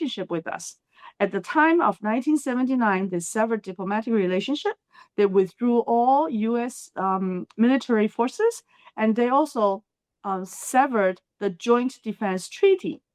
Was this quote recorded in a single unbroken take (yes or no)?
yes